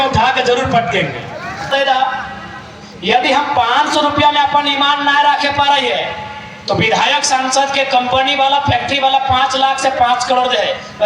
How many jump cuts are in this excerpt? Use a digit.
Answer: 1